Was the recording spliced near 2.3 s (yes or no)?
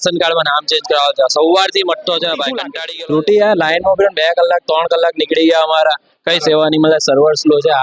no